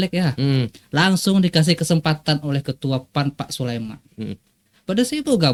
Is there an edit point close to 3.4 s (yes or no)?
no